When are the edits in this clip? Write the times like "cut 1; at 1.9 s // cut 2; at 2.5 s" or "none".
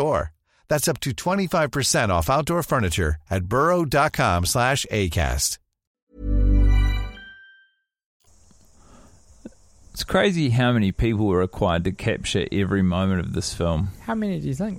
none